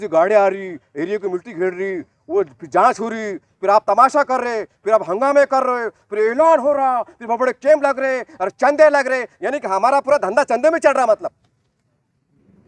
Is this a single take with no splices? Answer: yes; 0 cuts

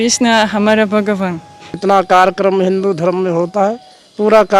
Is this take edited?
yes; 1 cut; at 1.8 s

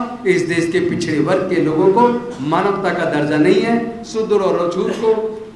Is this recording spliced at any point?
no; 0 cuts

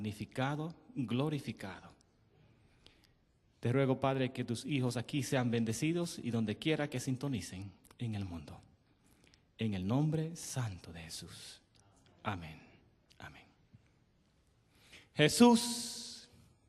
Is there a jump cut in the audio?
yes; 1 cut; at 8.1 s

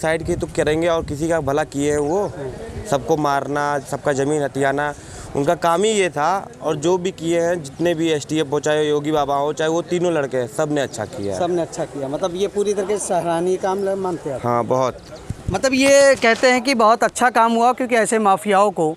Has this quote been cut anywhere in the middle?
no; 0 cuts

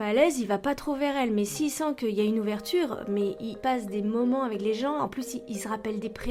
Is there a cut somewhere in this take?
no; 0 cuts

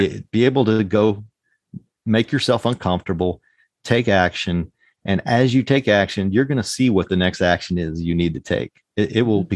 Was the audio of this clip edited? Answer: no; 0 cuts

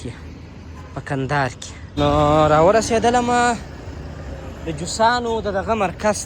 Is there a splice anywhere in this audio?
yes; 1 cut; at 1.9 s

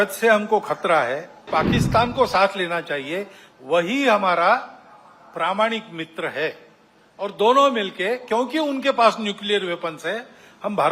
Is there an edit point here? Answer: yes; 1 cut; at 1.5 s

